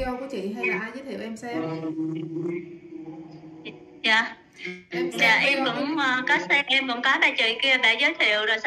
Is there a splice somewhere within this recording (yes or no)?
no